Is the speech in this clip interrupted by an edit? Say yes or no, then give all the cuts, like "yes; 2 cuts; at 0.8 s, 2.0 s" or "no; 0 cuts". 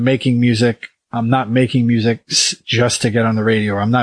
no; 0 cuts